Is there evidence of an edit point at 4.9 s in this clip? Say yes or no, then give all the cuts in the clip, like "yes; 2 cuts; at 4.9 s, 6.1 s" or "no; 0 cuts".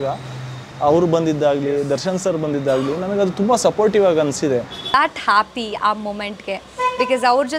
yes; 1 cut; at 4.9 s